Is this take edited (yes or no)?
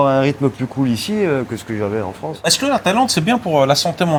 no